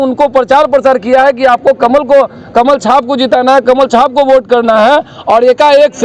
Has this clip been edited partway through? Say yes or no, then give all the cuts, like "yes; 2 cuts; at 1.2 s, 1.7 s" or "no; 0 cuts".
no; 0 cuts